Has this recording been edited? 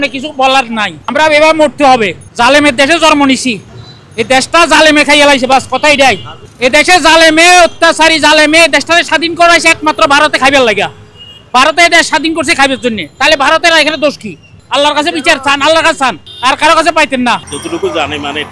no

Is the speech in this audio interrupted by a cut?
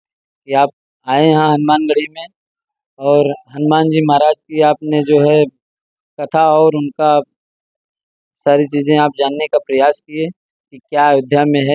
no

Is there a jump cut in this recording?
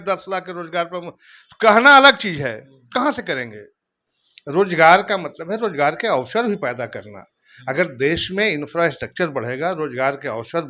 no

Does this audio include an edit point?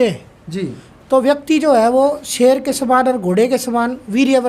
no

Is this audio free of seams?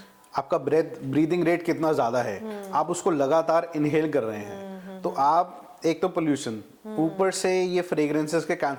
yes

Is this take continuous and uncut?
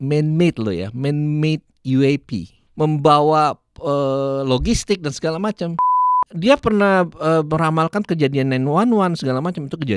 no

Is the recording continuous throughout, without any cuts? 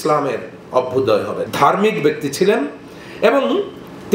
no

